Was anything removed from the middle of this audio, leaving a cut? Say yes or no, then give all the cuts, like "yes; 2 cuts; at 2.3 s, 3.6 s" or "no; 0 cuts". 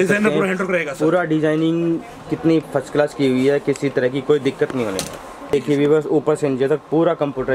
yes; 1 cut; at 5.5 s